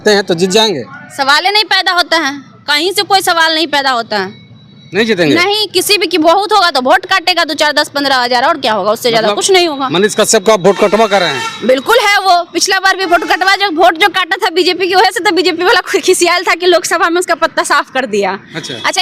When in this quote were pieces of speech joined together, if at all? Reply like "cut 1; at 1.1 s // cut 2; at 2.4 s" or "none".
none